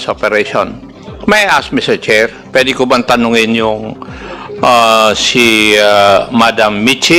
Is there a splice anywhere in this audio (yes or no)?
no